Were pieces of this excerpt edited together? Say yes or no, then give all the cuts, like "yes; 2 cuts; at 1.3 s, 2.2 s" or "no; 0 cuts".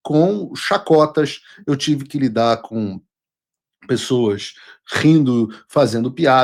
no; 0 cuts